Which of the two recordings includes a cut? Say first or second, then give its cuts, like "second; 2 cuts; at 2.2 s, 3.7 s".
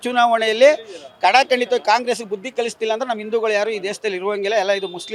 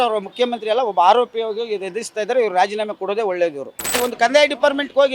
second; 1 cut; at 4.0 s